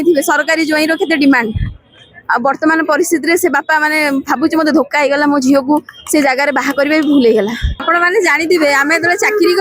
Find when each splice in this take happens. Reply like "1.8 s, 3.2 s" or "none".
7.7 s